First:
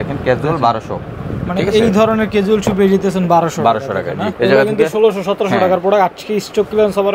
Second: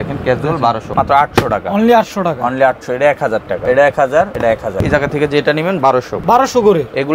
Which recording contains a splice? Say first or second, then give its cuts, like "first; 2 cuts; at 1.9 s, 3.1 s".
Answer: second; 4 cuts; at 0.9 s, 3.6 s, 4.7 s, 6.1 s